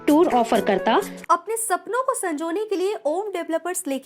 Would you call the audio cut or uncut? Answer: cut